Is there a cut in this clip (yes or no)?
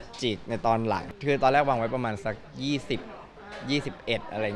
yes